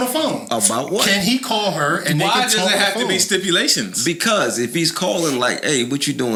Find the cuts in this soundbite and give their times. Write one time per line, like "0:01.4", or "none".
none